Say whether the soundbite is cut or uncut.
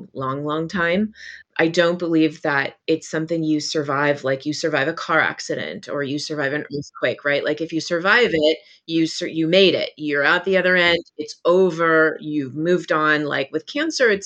cut